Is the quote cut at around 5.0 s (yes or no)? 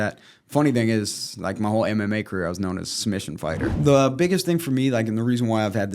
no